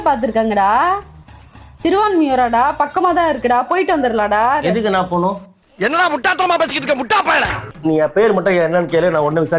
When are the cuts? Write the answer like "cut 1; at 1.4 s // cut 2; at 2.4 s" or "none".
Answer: cut 1; at 7.7 s